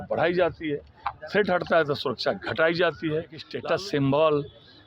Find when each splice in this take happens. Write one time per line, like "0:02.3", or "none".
0:03.5